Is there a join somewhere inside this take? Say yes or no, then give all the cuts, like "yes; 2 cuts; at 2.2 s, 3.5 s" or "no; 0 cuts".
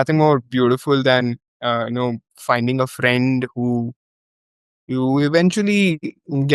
no; 0 cuts